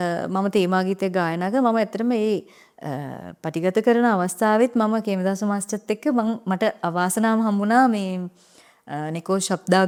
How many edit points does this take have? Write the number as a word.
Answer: zero